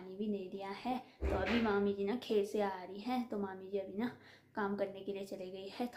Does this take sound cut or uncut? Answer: uncut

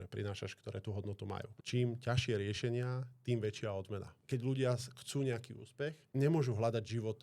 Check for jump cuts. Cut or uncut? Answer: cut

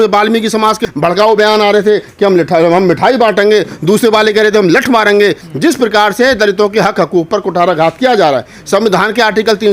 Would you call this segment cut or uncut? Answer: cut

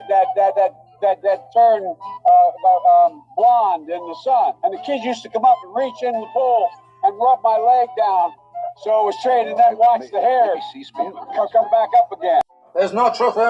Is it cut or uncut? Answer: uncut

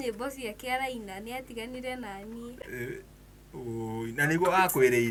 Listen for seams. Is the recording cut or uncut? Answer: uncut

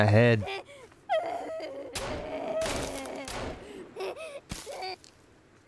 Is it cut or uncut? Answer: uncut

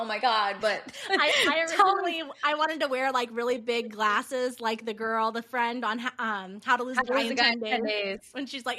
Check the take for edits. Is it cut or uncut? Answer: uncut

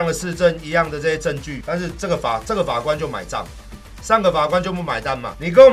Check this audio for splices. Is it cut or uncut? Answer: uncut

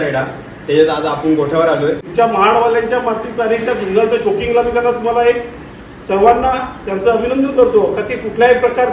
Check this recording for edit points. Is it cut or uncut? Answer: cut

